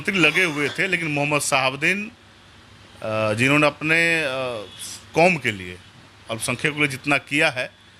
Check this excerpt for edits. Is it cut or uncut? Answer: uncut